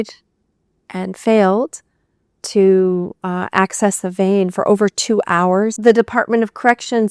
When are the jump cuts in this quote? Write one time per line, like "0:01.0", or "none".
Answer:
0:05.8